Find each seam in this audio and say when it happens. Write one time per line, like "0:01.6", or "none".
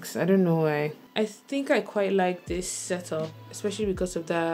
0:01.0

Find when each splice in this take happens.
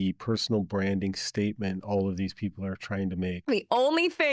0:03.4

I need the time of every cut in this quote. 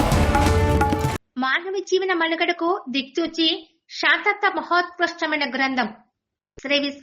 0:01.1

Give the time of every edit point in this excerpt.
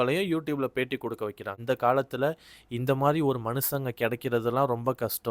0:01.6

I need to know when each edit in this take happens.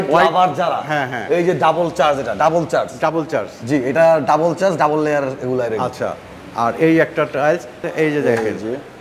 0:07.8

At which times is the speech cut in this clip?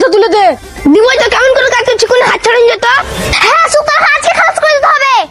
0:03.2

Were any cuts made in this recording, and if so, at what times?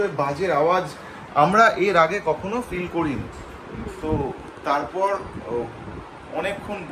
none

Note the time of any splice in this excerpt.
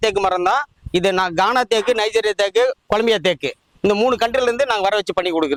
none

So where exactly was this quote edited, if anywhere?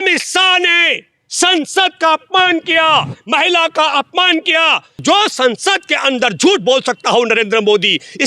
0:05.0

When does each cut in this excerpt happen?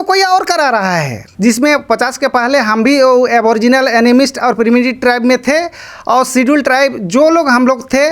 0:01.2

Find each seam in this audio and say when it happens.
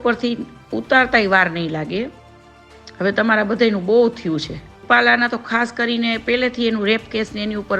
0:04.8

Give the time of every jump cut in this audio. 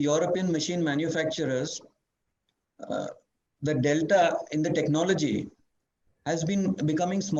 none

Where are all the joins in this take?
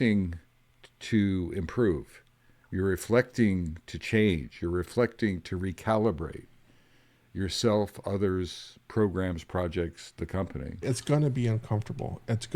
0:10.8

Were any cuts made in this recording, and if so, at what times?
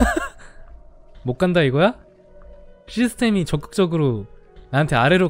none

